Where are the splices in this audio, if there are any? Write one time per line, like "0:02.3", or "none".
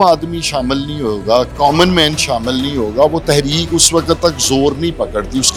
none